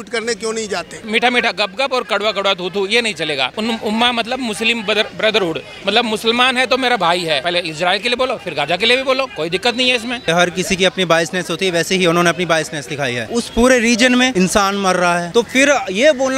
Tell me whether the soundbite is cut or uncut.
cut